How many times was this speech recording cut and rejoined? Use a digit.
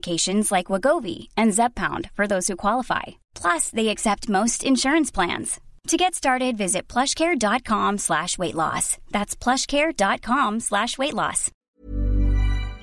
1